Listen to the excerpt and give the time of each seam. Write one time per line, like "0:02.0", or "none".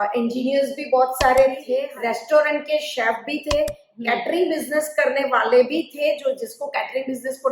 0:01.8